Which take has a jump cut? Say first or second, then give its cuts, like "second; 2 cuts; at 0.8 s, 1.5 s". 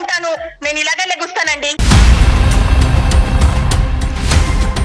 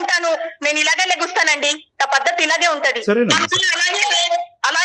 first; 1 cut; at 1.8 s